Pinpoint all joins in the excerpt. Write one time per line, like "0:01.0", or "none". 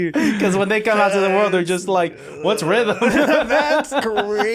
none